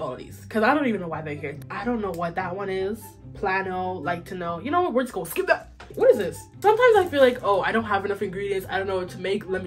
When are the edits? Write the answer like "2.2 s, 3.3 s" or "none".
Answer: 1.5 s, 6.3 s